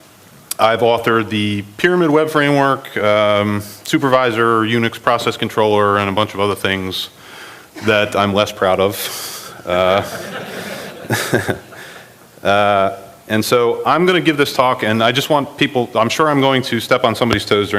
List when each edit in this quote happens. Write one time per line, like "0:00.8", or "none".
0:06.5